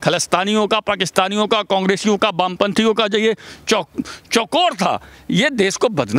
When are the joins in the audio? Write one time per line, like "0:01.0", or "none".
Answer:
none